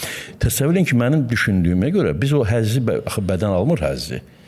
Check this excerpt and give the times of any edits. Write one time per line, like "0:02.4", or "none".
none